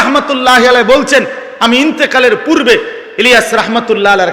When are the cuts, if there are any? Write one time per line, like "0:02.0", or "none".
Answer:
none